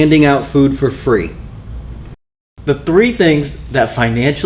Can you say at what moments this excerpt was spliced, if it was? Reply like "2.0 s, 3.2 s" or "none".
2.2 s